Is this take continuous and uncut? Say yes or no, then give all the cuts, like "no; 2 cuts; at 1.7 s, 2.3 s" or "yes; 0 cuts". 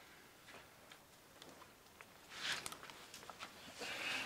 no; 1 cut; at 1.6 s